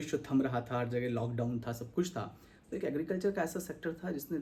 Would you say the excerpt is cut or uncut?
uncut